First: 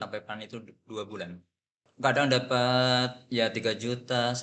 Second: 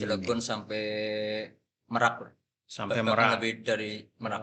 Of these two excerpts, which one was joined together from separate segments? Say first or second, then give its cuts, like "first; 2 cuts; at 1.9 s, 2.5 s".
first; 1 cut; at 1.9 s